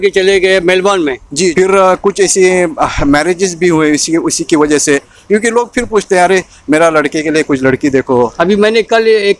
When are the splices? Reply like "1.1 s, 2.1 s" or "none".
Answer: 1.5 s, 8.3 s